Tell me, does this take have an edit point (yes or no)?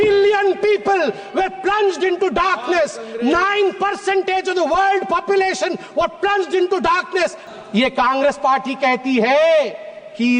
yes